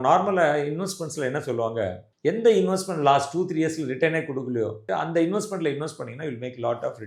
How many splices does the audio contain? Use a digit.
0